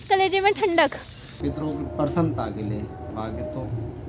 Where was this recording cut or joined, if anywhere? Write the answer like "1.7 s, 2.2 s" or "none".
1.3 s, 3.1 s